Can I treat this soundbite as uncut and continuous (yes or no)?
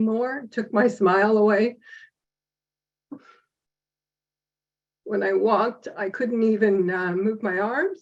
yes